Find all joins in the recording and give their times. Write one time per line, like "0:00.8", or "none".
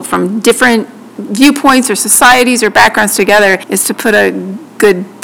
0:03.7

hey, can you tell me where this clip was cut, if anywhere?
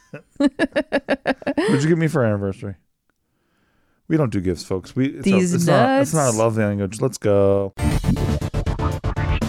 0:07.8

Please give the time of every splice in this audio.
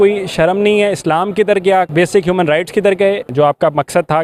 0:01.9
0:03.3

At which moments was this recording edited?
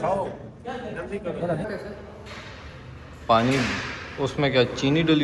0:01.7

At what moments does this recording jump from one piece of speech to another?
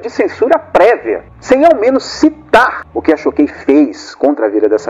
0:01.3

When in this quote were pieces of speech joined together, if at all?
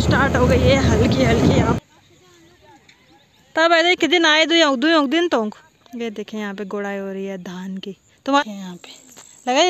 0:01.8
0:08.4

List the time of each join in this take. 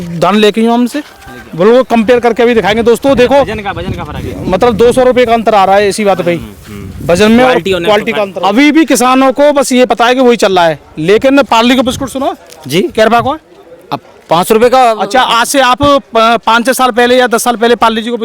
0:08.2

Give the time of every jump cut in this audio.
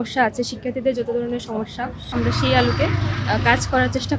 0:02.1

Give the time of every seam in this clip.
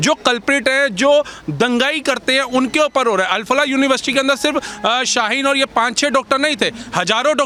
none

